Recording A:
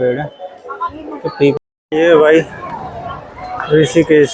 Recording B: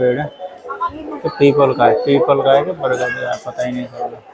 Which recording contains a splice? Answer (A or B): A